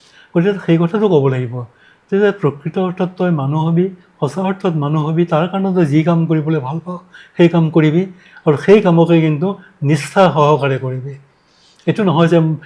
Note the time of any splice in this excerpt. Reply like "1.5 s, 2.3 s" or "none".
none